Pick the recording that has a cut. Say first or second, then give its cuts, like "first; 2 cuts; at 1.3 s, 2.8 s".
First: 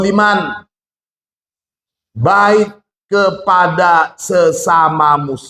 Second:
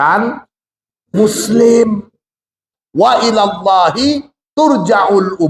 second; 1 cut; at 2.7 s